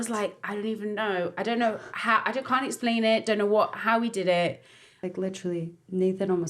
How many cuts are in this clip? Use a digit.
1